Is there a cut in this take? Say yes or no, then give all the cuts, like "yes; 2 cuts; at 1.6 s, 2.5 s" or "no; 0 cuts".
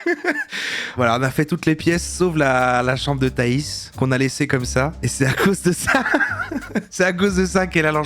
yes; 2 cuts; at 1.0 s, 6.9 s